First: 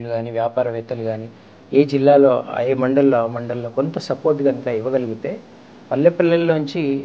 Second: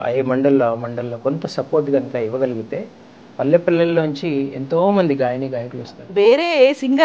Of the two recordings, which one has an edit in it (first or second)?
second